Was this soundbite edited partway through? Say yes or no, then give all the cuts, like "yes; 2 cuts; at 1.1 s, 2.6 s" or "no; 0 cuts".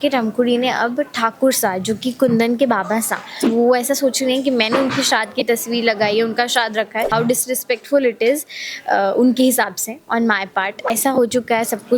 yes; 3 cuts; at 3.4 s, 7.1 s, 11.0 s